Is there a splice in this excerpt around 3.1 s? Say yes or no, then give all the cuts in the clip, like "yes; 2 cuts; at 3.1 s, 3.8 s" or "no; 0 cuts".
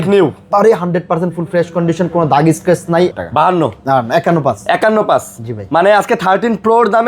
yes; 1 cut; at 3.1 s